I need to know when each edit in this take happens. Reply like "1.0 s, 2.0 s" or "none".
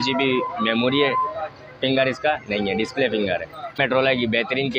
3.8 s

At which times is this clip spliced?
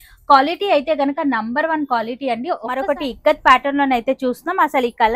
2.8 s

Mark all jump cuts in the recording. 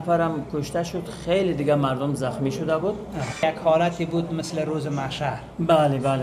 3.2 s

